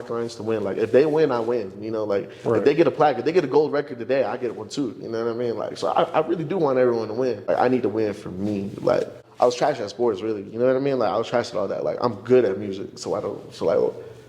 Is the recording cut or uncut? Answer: cut